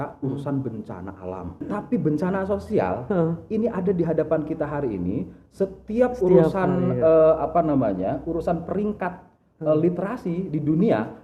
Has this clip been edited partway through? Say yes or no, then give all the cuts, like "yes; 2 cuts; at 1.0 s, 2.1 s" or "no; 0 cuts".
yes; 1 cut; at 1.6 s